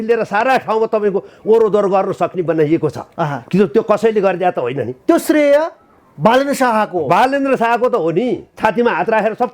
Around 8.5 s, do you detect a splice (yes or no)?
yes